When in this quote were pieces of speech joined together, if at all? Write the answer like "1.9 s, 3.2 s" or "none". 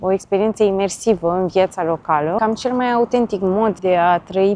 2.4 s, 3.8 s